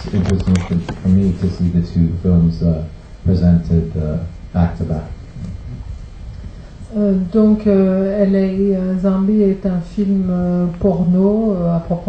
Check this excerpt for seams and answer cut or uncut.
cut